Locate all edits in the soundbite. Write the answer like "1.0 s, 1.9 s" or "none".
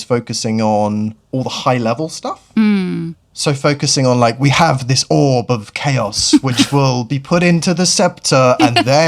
none